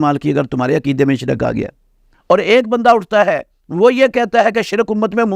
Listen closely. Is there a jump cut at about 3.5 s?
no; 1 cut; at 2.1 s

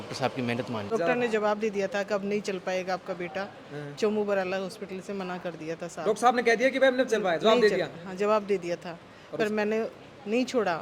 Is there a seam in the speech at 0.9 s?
yes; 1 cut; at 0.9 s

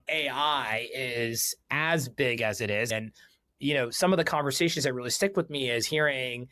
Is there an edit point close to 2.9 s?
yes; 1 cut; at 2.9 s

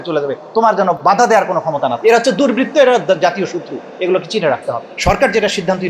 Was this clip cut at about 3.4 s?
no; 3 cuts; at 1.0 s, 2.0 s, 4.9 s

